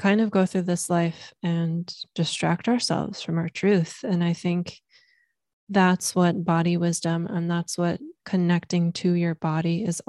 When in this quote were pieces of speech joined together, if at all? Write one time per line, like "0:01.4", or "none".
none